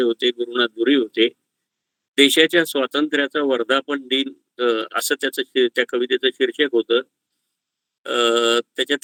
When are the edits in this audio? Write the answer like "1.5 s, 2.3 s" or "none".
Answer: none